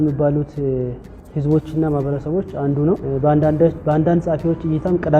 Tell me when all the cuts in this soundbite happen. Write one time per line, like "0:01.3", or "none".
0:03.0